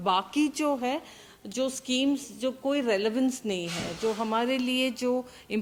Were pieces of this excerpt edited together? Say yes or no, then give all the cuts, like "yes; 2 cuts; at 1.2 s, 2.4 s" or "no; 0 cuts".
no; 0 cuts